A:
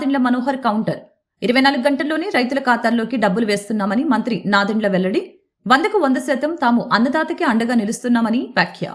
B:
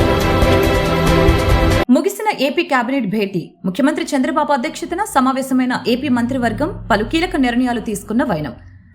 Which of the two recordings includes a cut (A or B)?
B